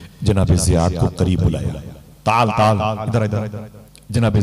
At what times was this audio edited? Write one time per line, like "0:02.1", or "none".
0:03.0